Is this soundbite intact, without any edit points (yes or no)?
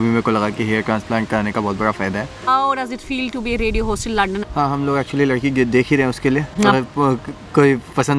no